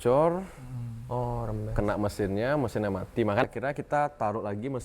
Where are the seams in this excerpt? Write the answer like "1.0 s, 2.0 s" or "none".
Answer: 3.4 s